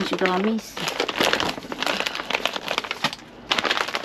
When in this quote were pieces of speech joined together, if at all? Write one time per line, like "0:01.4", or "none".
none